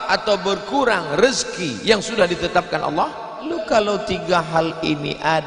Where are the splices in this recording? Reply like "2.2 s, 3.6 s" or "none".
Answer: 3.5 s